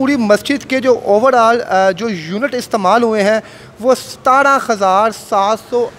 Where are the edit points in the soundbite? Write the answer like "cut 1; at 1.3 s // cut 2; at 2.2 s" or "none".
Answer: none

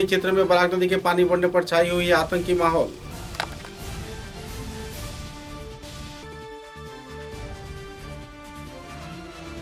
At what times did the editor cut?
none

